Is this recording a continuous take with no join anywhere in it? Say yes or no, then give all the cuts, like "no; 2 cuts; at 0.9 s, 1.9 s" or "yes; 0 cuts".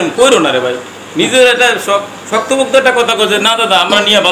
yes; 0 cuts